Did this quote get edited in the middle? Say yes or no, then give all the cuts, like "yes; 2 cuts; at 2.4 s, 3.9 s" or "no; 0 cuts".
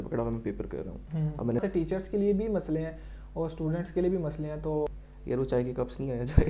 yes; 2 cuts; at 1.6 s, 5.0 s